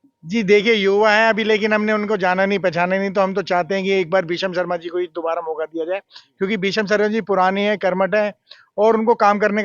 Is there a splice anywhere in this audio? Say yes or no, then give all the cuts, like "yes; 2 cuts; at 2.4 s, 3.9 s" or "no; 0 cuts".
no; 0 cuts